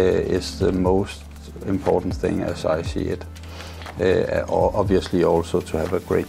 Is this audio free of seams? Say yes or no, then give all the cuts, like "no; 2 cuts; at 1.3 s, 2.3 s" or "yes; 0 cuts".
yes; 0 cuts